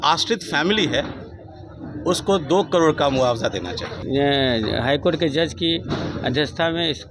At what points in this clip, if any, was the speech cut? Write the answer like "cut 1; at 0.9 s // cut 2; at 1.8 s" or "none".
cut 1; at 4.0 s